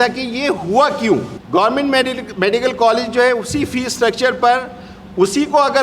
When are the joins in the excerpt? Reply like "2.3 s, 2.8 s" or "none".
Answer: 1.4 s